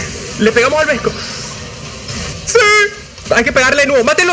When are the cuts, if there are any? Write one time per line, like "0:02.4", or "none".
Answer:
0:02.3